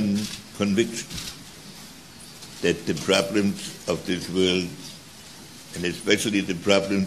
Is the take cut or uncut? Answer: uncut